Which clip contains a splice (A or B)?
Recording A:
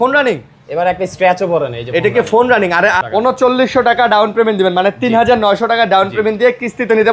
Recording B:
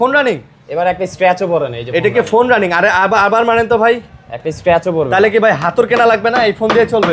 A